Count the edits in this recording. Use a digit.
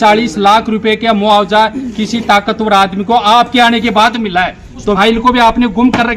1